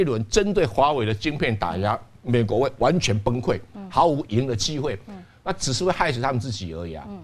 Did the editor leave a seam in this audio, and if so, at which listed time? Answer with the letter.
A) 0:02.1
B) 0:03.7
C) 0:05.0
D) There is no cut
D